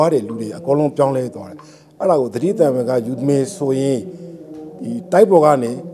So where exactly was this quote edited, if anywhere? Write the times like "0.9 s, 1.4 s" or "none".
none